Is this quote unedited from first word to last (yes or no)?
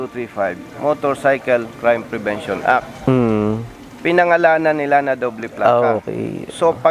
yes